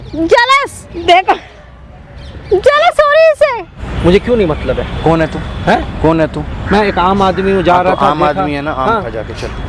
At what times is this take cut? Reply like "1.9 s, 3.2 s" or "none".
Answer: 3.9 s